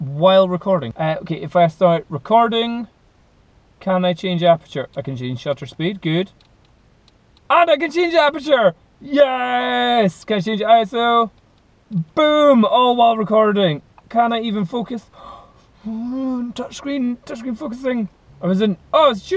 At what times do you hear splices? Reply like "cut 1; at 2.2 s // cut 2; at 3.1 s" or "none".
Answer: cut 1; at 0.9 s // cut 2; at 18.2 s